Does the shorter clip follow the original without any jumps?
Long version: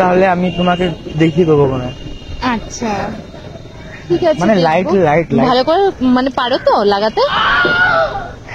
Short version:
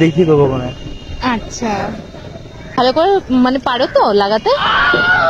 no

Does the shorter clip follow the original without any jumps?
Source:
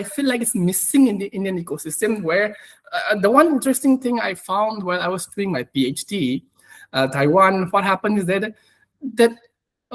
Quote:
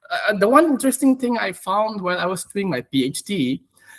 yes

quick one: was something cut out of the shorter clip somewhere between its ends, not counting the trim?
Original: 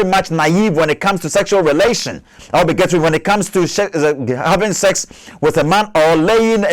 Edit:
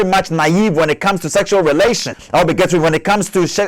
yes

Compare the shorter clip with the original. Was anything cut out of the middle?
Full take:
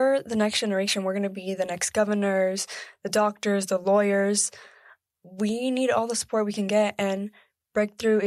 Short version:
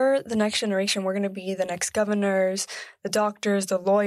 no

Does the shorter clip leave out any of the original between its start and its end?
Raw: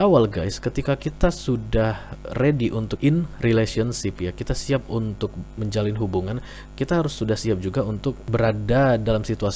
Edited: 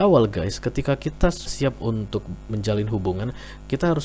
yes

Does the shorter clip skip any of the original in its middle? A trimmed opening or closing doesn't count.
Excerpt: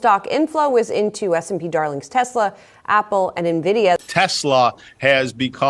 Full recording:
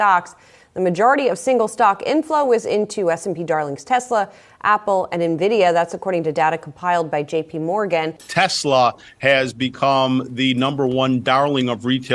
yes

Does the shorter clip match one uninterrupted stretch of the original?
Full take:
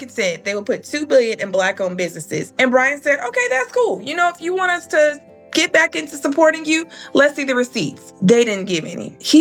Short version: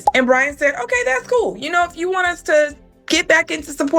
yes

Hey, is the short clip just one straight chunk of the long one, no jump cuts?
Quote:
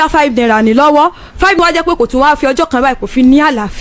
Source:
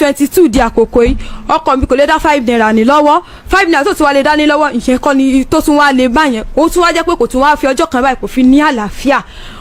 no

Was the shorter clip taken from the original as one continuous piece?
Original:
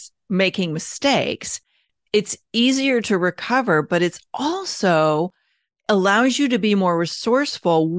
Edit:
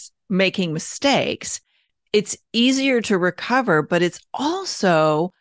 yes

